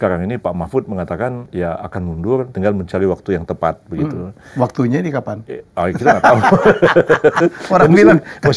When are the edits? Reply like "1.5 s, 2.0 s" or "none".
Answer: 1.4 s, 2.5 s